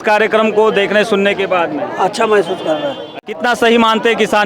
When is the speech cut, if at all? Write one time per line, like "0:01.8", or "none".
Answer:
0:03.2